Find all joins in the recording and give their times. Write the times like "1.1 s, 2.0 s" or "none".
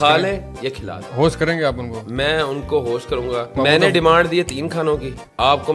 none